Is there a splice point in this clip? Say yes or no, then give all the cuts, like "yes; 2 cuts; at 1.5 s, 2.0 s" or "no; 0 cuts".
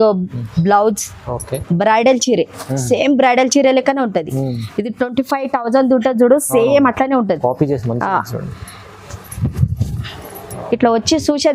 no; 0 cuts